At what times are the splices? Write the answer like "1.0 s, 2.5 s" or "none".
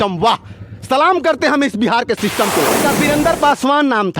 2.8 s